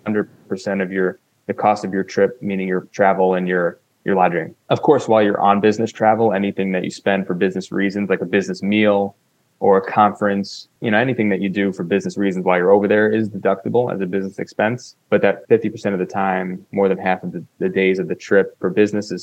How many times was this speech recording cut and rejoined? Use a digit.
4